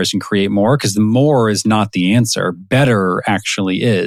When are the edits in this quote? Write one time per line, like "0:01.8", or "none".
none